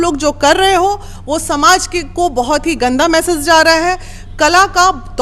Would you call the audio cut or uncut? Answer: uncut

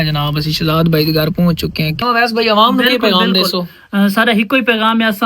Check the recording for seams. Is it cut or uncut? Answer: cut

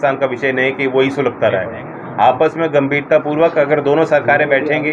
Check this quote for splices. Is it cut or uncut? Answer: uncut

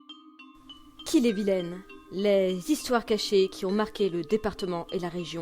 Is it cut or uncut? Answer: cut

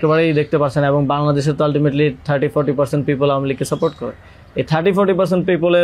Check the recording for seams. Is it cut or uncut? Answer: uncut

